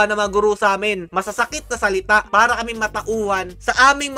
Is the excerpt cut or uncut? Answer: uncut